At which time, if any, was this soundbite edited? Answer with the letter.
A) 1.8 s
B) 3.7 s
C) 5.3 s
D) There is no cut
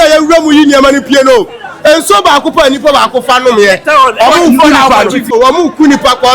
C